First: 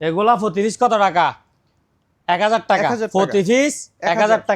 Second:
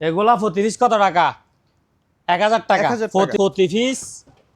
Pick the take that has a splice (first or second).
second